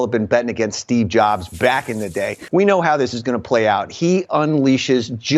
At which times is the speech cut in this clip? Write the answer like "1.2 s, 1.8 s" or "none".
2.4 s